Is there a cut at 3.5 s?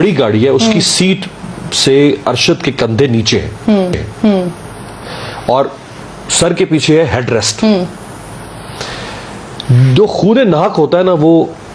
no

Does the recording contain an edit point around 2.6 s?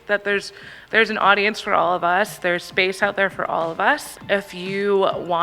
no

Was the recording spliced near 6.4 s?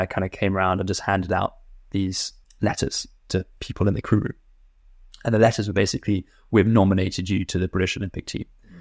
no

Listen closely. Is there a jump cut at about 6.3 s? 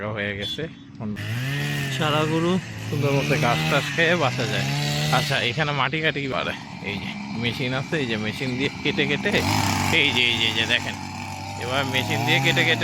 yes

